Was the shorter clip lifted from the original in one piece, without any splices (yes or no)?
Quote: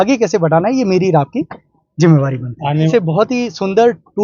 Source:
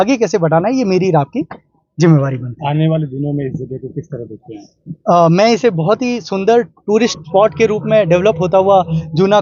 no